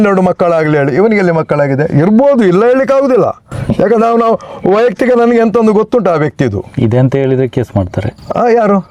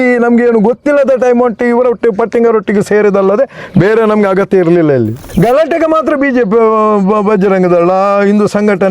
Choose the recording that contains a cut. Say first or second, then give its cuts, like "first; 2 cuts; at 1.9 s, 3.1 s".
second; 1 cut; at 5.2 s